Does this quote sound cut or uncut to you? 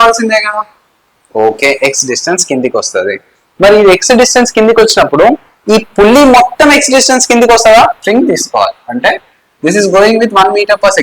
cut